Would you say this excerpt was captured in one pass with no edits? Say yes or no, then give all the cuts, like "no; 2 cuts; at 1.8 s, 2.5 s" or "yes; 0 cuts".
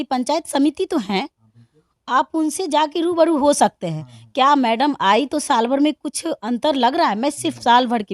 yes; 0 cuts